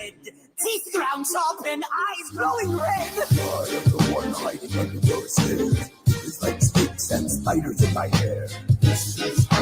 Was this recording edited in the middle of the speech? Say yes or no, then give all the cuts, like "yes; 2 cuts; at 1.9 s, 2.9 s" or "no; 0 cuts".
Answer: yes; 3 cuts; at 1.4 s, 4.6 s, 8.1 s